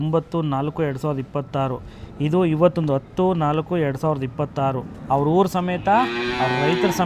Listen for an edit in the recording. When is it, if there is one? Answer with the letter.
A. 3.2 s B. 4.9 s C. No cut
B